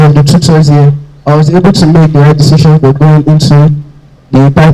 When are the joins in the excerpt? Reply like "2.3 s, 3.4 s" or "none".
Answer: none